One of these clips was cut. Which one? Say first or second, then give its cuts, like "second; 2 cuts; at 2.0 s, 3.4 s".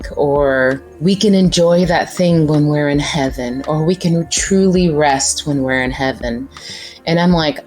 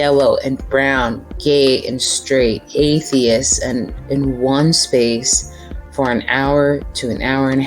second; 1 cut; at 4.0 s